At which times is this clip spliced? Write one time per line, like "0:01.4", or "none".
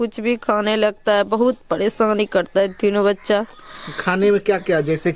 none